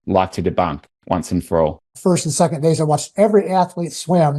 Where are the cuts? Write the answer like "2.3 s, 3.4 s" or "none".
1.9 s